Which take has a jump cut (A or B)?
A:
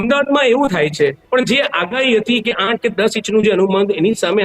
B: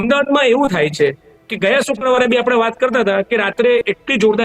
A